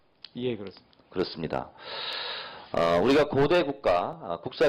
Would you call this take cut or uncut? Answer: cut